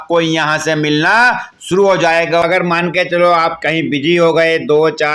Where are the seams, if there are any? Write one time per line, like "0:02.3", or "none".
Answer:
0:02.4